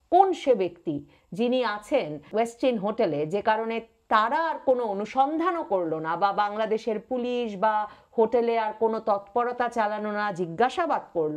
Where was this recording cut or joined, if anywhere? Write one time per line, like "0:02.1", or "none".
0:02.2